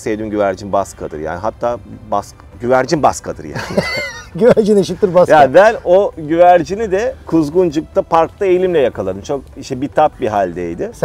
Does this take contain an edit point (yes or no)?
no